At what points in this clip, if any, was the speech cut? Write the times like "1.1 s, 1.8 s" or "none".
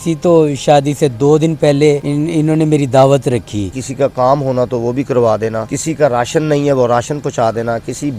2.1 s, 3.8 s, 5.7 s